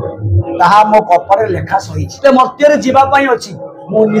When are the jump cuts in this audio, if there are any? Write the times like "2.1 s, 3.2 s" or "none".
2.2 s